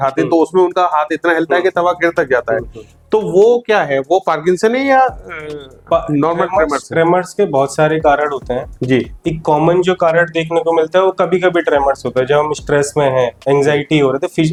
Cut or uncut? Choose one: uncut